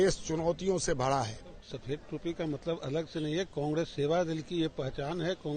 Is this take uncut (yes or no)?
no